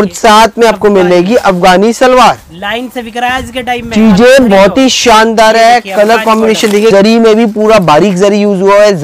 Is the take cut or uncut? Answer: cut